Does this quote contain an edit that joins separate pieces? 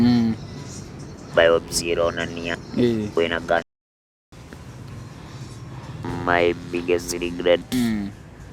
yes; 1 cut; at 4.0 s

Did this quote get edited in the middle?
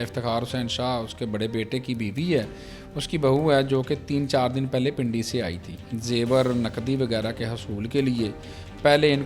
yes; 1 cut; at 5.9 s

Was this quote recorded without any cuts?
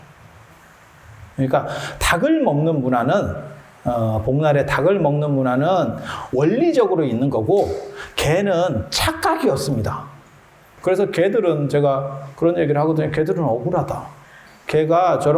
no; 1 cut; at 10.7 s

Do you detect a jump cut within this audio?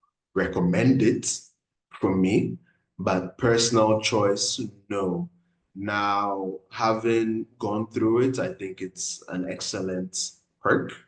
no; 0 cuts

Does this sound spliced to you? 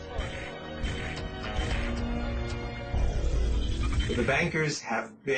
yes; 1 cut; at 3.4 s

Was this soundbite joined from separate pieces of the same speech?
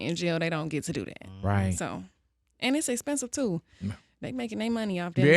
no; 0 cuts

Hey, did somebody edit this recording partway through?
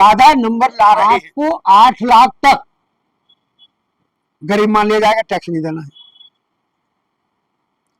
yes; 1 cut; at 1.0 s

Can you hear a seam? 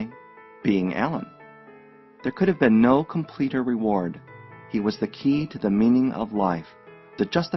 no; 0 cuts

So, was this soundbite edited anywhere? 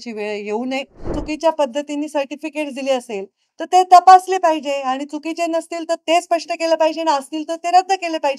yes; 1 cut; at 1.1 s

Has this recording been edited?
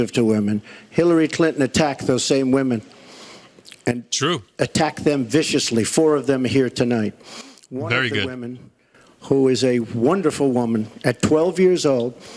no; 0 cuts

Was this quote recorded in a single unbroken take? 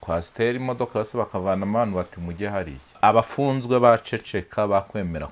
no; 1 cut; at 3.0 s

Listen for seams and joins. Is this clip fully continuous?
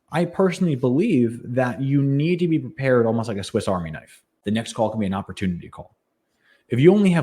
no; 1 cut; at 4.3 s

